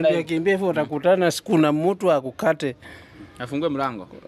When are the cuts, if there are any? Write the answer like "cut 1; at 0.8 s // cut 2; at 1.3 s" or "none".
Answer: none